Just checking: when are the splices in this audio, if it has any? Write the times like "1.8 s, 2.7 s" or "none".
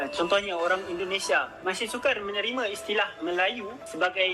2.0 s